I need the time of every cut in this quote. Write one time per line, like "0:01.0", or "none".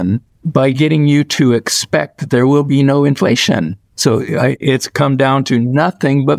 none